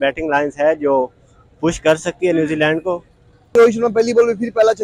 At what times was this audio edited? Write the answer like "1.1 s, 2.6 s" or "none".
3.5 s